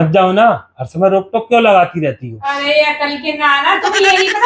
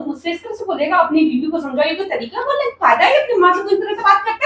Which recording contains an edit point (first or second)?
first